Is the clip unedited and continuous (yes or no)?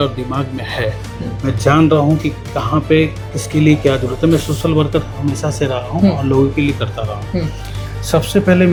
yes